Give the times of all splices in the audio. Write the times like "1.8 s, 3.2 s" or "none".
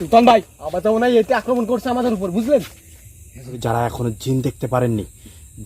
3.5 s